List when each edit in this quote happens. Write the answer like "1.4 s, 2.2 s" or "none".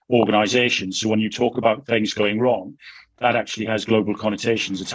none